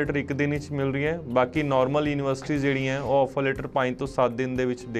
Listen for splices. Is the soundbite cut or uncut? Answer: uncut